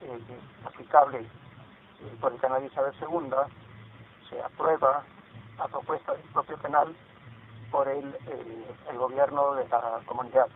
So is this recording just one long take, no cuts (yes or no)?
yes